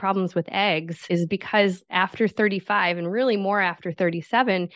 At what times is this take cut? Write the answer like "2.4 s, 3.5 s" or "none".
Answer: 1.1 s